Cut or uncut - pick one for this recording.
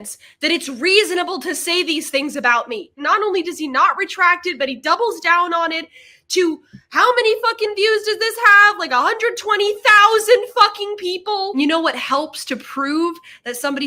cut